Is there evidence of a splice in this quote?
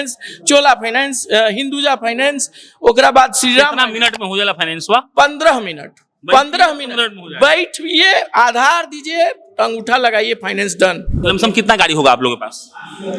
yes; 1 cut; at 11.2 s

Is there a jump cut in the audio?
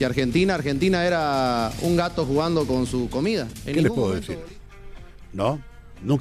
yes; 1 cut; at 3.6 s

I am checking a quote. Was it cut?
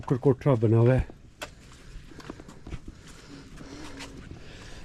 no; 0 cuts

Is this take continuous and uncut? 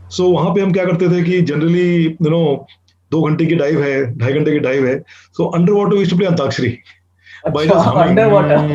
yes; 0 cuts

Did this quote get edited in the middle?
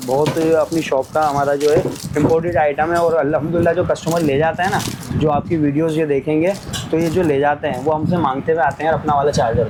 no; 0 cuts

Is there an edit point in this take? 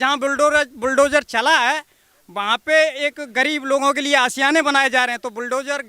no; 0 cuts

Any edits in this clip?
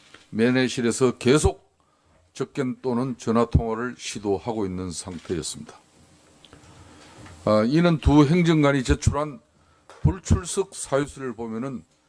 no; 0 cuts

